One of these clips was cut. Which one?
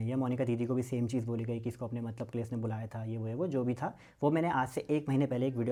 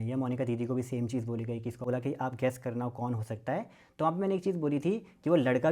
second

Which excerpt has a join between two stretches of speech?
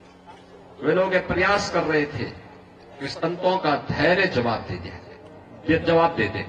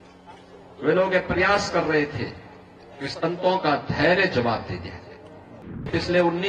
second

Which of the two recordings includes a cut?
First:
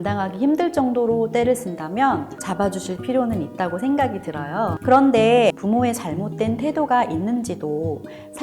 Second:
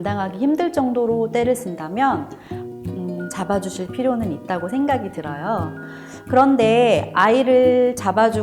first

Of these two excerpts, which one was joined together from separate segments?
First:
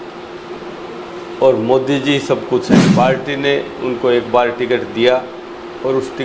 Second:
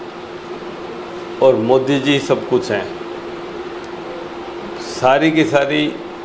first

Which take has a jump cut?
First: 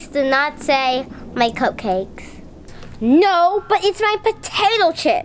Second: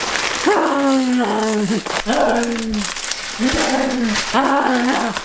second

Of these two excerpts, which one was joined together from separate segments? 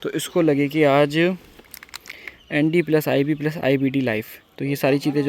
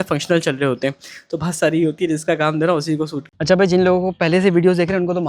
second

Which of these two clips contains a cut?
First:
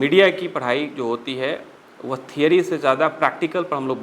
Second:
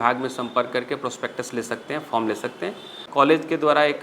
second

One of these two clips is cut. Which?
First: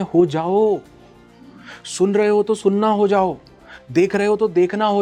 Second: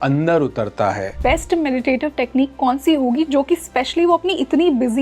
second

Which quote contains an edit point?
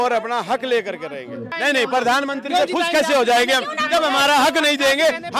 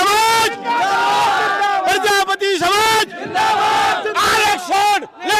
first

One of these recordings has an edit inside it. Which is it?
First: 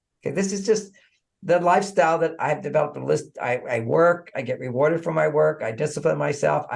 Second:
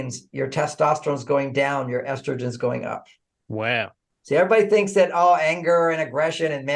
second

